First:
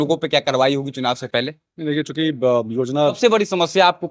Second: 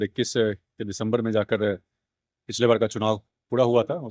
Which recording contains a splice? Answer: first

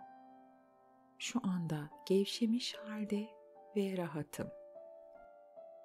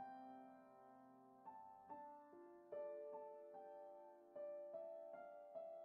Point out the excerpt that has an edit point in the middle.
first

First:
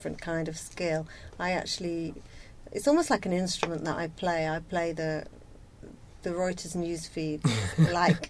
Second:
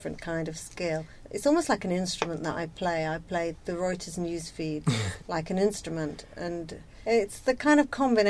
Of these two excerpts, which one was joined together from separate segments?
second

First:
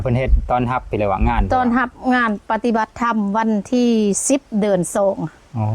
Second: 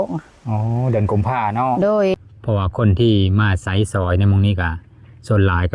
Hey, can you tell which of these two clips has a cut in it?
second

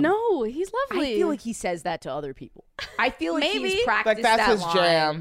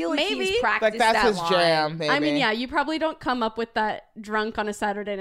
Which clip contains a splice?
first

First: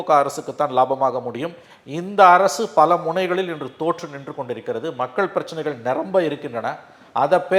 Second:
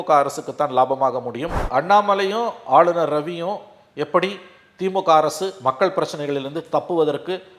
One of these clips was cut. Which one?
second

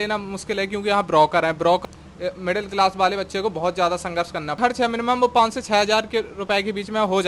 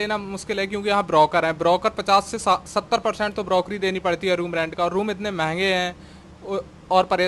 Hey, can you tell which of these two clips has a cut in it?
first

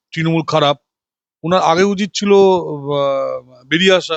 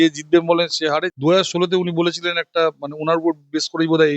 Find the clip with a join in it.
second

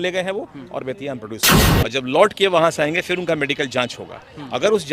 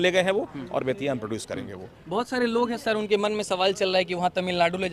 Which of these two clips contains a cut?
first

